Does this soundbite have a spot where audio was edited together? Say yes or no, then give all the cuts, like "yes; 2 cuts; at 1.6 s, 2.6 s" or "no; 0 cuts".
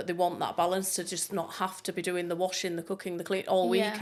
no; 0 cuts